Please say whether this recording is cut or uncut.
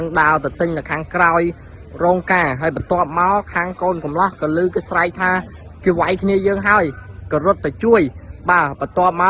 uncut